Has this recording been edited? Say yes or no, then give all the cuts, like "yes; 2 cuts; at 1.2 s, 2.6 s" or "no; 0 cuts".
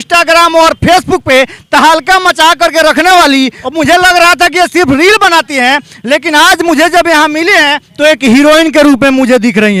no; 0 cuts